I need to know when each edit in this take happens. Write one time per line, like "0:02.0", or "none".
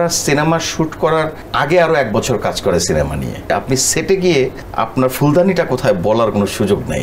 0:01.4
0:03.5
0:04.6